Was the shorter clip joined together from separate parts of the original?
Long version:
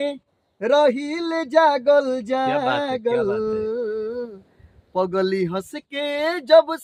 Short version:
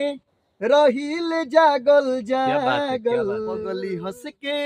yes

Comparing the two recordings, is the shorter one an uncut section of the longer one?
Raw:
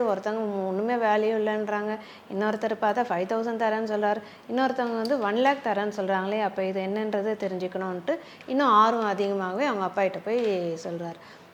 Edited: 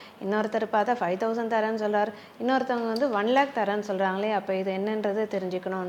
yes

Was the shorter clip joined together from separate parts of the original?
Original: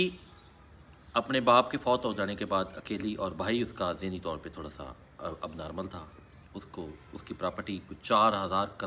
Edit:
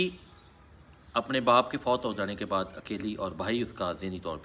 no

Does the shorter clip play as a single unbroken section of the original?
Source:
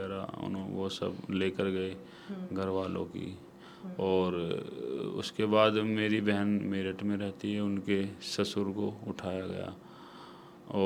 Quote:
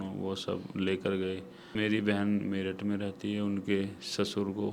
no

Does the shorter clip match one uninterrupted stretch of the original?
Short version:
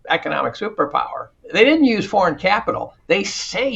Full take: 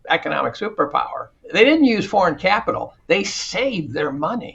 yes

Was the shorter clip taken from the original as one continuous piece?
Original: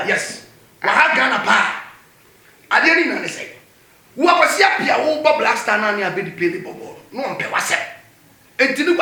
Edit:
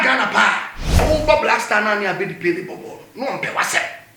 no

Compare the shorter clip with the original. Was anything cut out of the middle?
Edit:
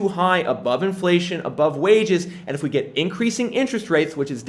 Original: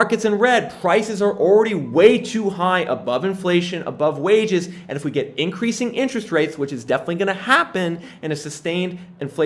no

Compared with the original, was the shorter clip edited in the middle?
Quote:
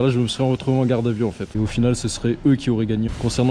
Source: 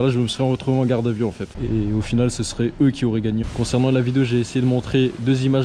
yes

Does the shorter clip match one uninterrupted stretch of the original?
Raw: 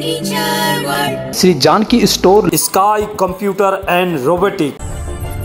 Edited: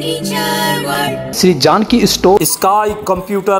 no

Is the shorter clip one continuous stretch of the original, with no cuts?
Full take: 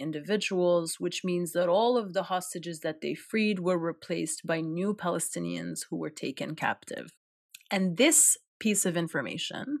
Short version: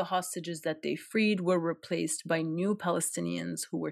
yes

